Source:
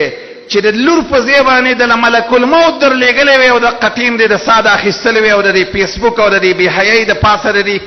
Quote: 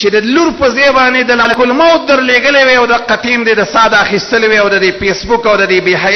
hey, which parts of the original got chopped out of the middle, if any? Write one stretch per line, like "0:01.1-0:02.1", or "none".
0:02.0-0:02.2